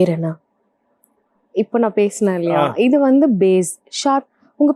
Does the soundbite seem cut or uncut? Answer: uncut